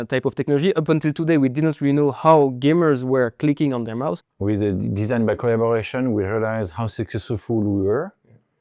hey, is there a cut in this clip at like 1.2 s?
no; 1 cut; at 4.3 s

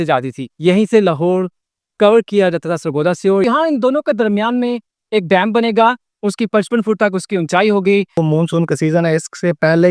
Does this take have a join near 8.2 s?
yes; 2 cuts; at 3.4 s, 8.2 s

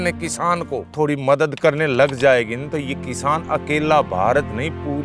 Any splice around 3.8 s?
no; 2 cuts; at 0.9 s, 1.6 s

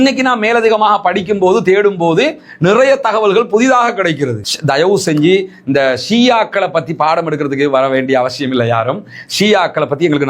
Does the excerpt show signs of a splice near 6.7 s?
no; 1 cut; at 4.5 s

